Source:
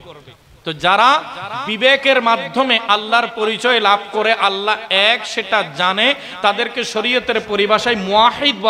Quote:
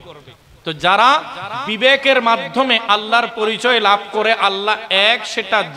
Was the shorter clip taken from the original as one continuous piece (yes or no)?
yes